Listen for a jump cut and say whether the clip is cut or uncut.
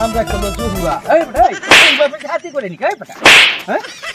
uncut